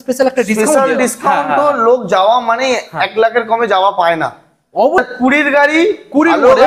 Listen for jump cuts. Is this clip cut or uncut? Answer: cut